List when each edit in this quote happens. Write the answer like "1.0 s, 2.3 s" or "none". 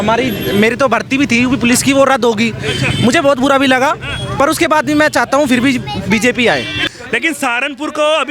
6.8 s